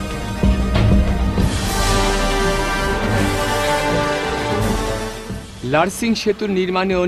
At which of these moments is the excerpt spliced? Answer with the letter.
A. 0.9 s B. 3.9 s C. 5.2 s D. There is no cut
C